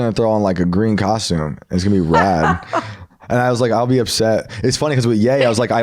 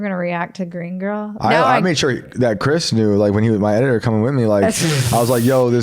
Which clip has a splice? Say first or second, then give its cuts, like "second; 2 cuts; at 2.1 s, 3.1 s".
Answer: second; 1 cut; at 1.3 s